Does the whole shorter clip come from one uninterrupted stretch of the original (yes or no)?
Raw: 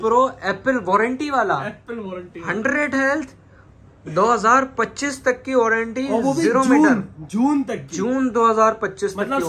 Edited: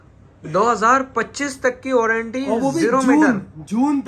yes